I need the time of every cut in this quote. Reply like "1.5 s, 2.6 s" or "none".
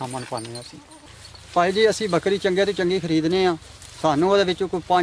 0.9 s

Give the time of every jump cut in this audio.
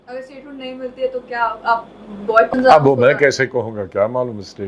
2.5 s

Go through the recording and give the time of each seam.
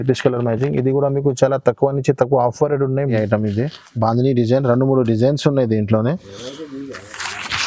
3.1 s

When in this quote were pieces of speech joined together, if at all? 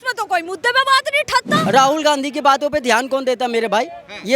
1.7 s

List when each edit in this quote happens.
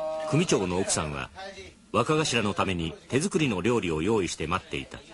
none

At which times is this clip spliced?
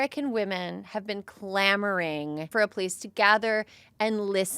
2.5 s

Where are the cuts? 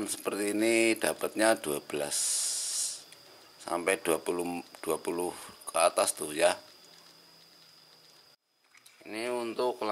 8.4 s

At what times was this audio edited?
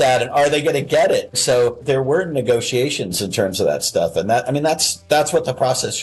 1.3 s

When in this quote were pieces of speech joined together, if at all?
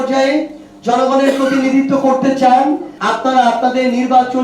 2.9 s

